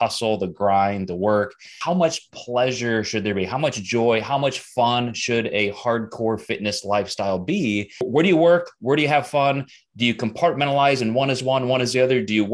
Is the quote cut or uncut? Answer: cut